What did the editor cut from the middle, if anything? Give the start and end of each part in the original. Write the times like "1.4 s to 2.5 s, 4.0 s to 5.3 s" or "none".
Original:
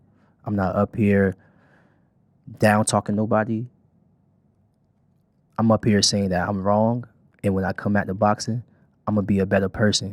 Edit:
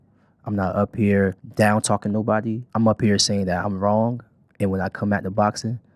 1.4 s to 2.5 s, 3.7 s to 5.5 s